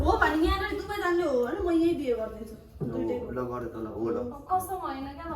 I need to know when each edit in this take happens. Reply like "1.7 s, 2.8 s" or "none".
2.7 s